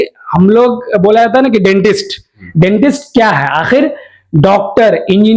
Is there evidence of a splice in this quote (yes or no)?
no